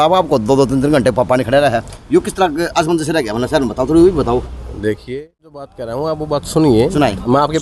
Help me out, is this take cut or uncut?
cut